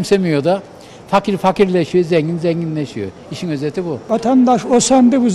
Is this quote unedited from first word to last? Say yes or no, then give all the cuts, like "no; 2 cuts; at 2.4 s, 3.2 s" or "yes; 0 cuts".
no; 1 cut; at 4.0 s